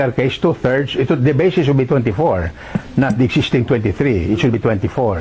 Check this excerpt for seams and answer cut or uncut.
uncut